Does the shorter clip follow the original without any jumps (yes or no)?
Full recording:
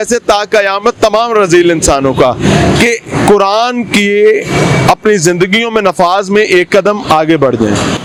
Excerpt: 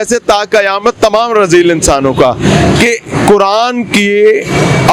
yes